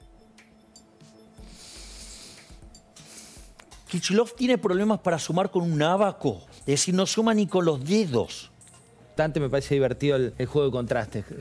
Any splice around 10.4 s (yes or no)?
yes